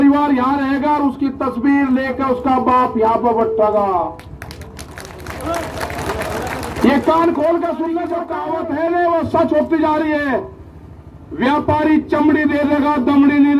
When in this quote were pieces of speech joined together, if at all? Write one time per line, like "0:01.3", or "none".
0:08.3